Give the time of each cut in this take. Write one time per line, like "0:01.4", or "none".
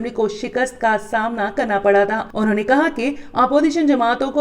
0:02.2